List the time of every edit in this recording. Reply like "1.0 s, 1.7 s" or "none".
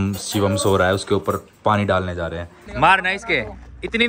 2.6 s